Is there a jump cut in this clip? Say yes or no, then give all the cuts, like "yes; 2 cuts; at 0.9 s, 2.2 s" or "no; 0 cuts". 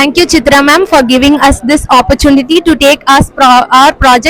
no; 0 cuts